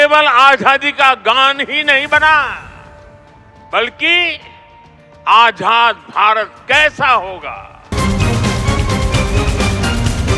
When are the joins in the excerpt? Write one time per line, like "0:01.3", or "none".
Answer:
0:07.9